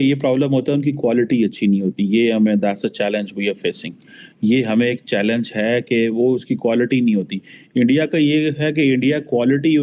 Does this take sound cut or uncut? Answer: uncut